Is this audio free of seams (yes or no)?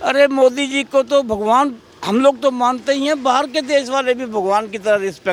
yes